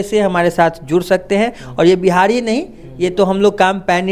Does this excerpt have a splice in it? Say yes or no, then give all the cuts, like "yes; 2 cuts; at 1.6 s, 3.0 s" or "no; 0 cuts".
no; 0 cuts